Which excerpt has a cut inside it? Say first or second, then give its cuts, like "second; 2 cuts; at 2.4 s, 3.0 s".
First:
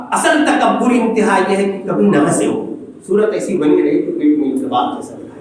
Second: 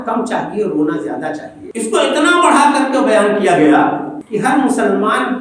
second; 2 cuts; at 1.6 s, 4.2 s